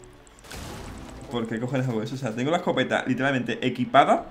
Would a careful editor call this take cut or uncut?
cut